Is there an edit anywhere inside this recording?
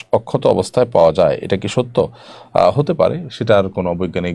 no; 0 cuts

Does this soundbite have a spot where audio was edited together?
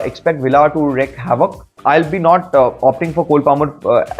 yes; 1 cut; at 1.7 s

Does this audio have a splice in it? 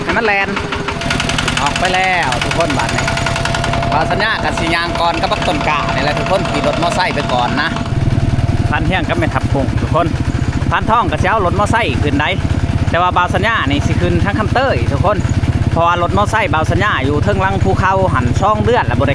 yes; 2 cuts; at 1.1 s, 8.1 s

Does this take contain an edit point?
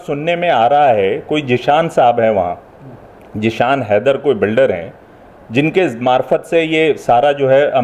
no; 0 cuts

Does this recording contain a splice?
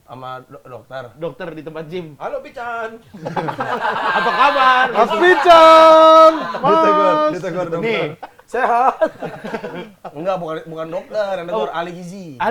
no; 0 cuts

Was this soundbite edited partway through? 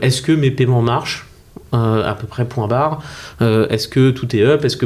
no; 0 cuts

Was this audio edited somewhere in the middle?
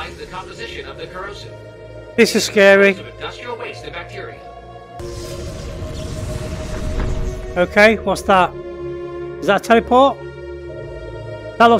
yes; 1 cut; at 5.0 s

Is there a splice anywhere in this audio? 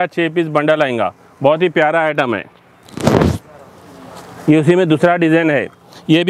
no; 0 cuts

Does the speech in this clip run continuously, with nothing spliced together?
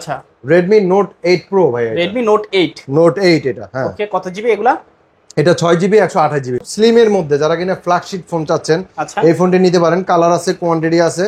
no; 1 cut; at 6.7 s

